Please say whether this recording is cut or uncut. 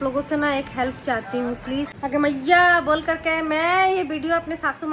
cut